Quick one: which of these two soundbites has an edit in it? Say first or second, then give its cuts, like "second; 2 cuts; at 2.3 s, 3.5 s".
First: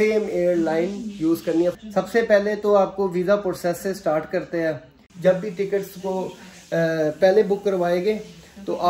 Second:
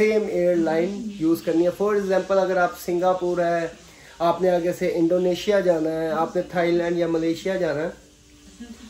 first; 2 cuts; at 1.8 s, 5.0 s